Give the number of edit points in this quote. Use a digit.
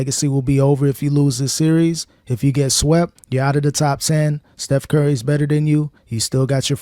0